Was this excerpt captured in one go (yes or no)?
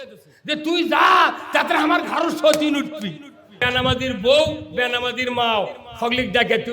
no